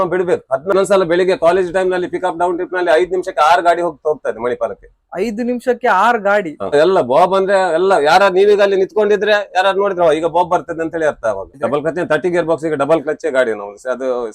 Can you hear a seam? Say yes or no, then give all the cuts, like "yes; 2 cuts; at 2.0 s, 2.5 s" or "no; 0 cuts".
yes; 3 cuts; at 0.7 s, 6.7 s, 11.5 s